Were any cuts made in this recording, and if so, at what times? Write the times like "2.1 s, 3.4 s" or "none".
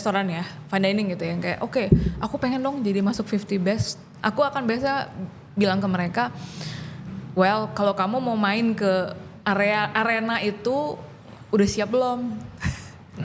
none